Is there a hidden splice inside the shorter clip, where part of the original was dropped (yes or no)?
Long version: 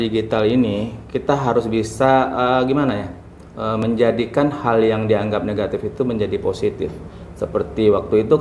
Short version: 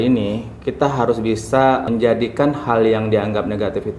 yes